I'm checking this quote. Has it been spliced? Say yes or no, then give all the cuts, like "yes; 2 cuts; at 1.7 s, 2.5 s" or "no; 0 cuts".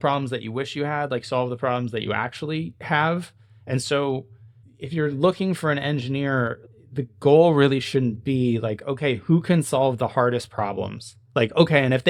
no; 0 cuts